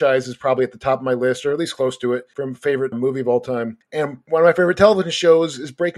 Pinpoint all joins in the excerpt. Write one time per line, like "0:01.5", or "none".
0:02.7
0:04.0